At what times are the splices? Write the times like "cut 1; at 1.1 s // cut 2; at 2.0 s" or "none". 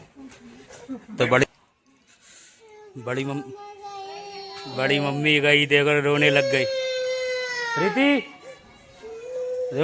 cut 1; at 1.4 s